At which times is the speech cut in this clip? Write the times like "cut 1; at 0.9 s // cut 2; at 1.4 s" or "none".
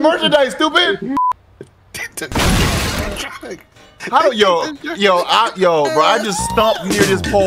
cut 1; at 1.2 s